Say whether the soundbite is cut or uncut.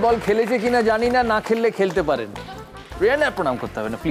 uncut